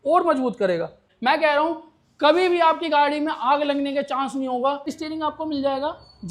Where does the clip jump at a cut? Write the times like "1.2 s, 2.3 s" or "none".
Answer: 1.1 s, 4.9 s

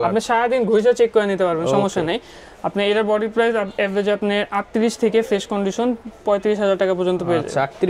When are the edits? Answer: none

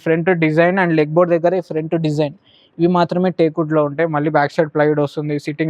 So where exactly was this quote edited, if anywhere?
none

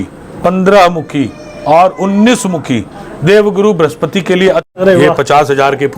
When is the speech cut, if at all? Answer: 4.6 s

